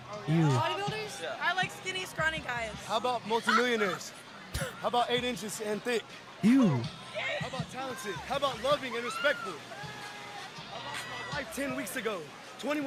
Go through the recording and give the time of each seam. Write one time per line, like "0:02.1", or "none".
none